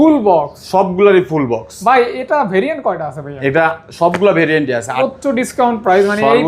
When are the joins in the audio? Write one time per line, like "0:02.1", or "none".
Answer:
0:05.0